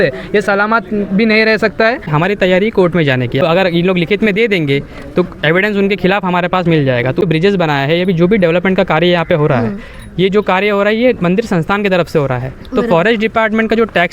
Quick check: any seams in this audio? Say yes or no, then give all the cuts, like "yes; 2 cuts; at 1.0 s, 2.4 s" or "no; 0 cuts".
yes; 3 cuts; at 2.1 s, 3.4 s, 7.2 s